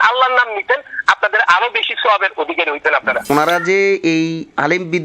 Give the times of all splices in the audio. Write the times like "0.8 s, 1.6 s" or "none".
3.3 s